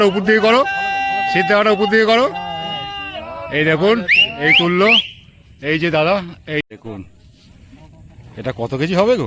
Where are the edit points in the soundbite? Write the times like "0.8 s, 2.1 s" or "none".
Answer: 6.6 s